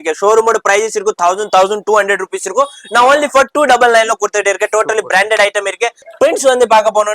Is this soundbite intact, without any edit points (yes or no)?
no